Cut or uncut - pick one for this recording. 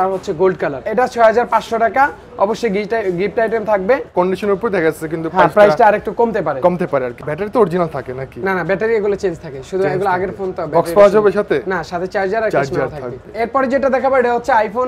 uncut